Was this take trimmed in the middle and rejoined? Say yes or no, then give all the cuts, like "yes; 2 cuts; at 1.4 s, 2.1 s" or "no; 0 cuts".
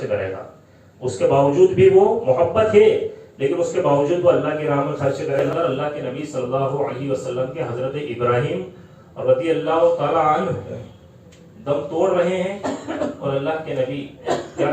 yes; 1 cut; at 5.5 s